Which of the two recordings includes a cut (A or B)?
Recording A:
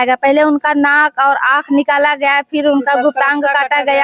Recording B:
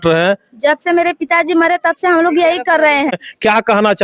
B